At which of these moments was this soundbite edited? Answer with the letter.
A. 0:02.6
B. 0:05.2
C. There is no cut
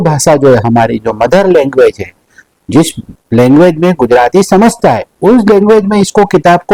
C